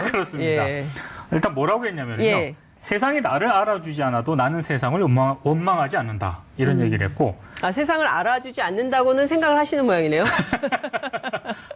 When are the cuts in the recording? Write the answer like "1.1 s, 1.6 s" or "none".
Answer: 1.5 s